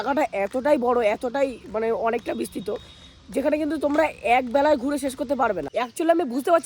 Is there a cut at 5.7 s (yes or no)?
yes